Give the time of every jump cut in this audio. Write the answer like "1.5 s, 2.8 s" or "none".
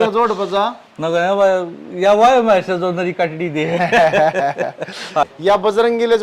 5.3 s